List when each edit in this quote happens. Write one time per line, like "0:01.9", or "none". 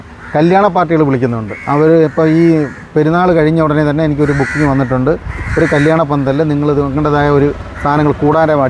none